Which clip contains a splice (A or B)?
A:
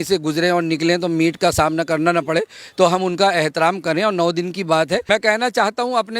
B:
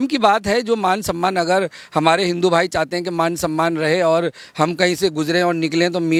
A